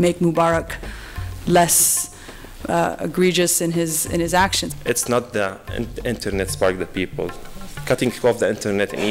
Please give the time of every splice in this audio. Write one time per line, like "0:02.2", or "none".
0:04.6